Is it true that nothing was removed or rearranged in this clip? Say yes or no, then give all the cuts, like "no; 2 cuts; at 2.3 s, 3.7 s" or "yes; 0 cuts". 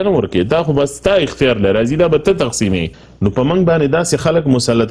no; 1 cut; at 3.0 s